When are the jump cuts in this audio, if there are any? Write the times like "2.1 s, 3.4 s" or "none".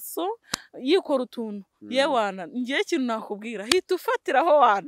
none

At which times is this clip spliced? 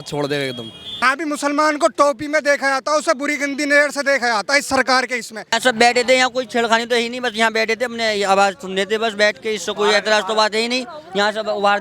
1.0 s, 5.6 s

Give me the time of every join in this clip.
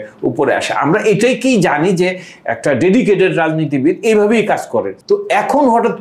4.9 s

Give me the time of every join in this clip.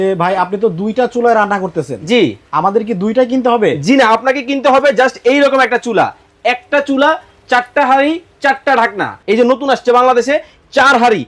9.1 s

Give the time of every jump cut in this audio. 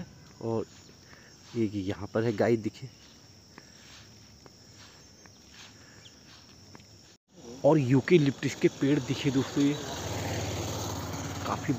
none

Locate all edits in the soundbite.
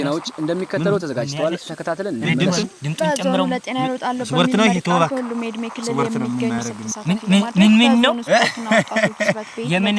6.7 s

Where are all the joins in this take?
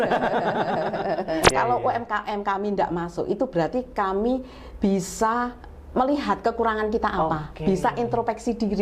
1.5 s

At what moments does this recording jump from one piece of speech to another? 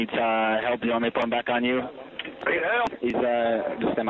2.9 s

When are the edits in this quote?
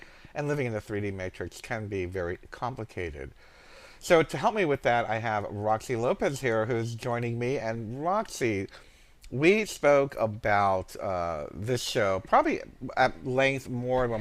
7.8 s

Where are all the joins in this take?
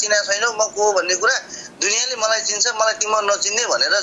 none

